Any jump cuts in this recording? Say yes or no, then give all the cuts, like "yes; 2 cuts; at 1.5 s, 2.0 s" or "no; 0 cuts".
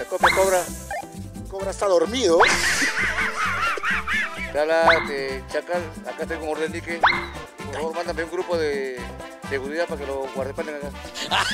no; 0 cuts